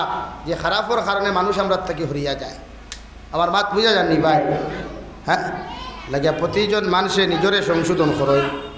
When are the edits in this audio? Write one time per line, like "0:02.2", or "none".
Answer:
0:04.9